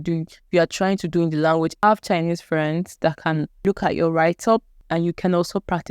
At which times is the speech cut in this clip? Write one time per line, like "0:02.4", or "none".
0:01.8
0:03.6
0:04.8